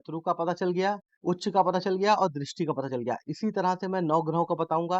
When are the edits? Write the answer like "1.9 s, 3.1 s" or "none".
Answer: 1.1 s